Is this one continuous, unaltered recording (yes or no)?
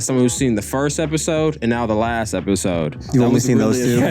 no